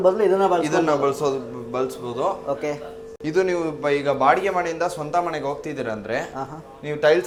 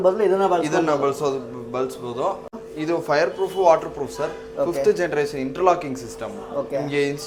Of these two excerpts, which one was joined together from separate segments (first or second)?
second